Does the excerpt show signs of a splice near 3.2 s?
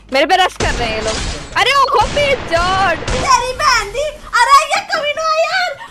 yes; 1 cut; at 3.2 s

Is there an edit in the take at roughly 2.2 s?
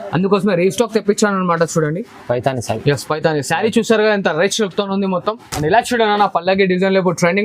no; 1 cut; at 5.5 s

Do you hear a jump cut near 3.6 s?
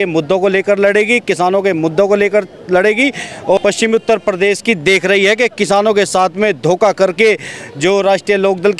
yes; 1 cut; at 3.6 s

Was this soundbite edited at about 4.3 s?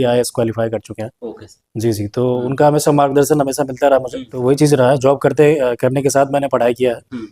yes; 1 cut; at 4.3 s

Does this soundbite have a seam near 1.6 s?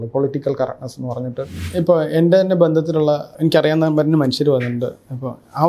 yes; 2 cuts; at 1.6 s, 3.3 s

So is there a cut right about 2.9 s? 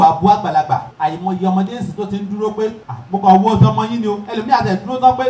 yes; 2 cuts; at 0.9 s, 2.9 s

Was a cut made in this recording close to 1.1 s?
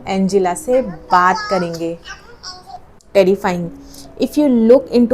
no; 1 cut; at 3.0 s

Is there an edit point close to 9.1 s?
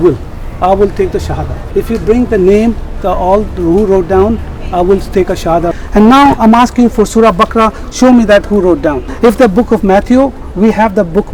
yes; 3 cuts; at 1.5 s, 5.7 s, 9.1 s

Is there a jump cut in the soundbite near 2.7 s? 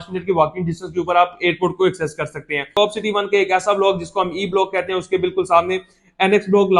yes; 1 cut; at 2.7 s

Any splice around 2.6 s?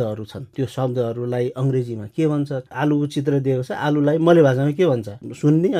yes; 1 cut; at 2.6 s

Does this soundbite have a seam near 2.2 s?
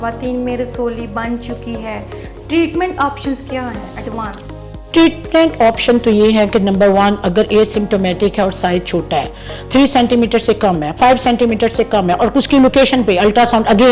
no; 0 cuts

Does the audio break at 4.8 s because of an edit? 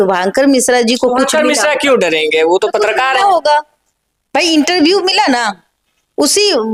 no; 0 cuts

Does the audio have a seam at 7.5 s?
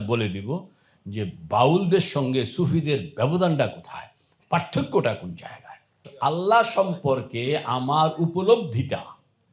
no; 1 cut; at 6.0 s

